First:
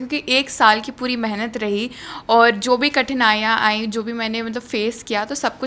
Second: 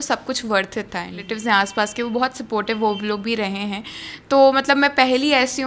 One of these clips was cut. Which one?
second; 1 cut; at 1.3 s

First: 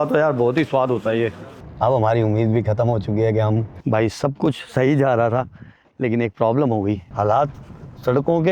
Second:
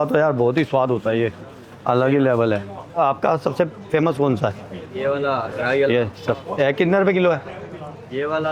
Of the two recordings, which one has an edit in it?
first; 3 cuts; at 1.6 s, 3.7 s, 7.1 s

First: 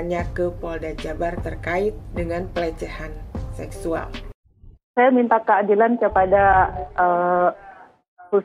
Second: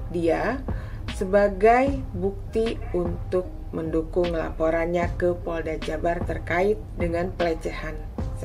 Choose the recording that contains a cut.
first; 1 cut; at 4.8 s

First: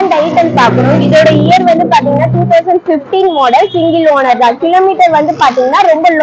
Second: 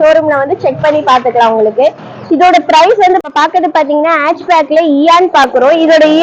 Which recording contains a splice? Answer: second; 1 cut; at 3.2 s

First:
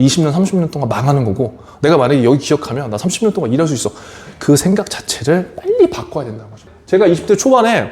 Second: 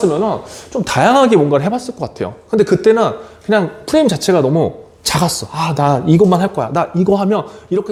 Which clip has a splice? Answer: first; 1 cut; at 6.8 s

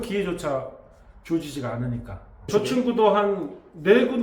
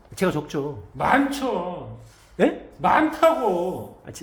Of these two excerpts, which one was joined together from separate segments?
first; 1 cut; at 2.5 s

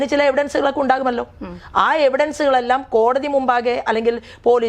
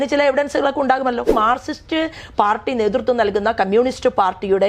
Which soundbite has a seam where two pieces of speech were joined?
second; 1 cut; at 1.3 s

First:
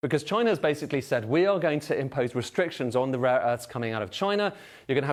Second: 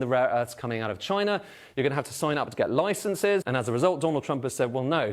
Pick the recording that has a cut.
second; 1 cut; at 3.5 s

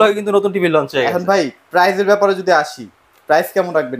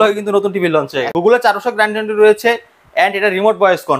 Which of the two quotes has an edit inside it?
second; 1 cut; at 1.1 s

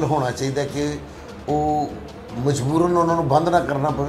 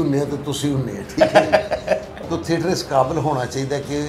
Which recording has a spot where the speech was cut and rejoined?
second; 1 cut; at 2.2 s

